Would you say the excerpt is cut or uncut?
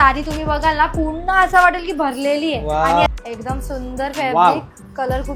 cut